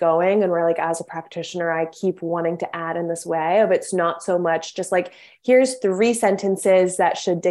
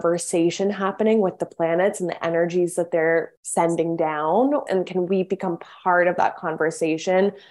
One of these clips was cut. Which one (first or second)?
second